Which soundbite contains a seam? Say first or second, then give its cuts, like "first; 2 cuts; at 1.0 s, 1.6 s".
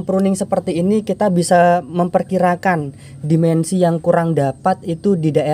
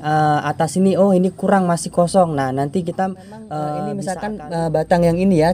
second; 1 cut; at 4.2 s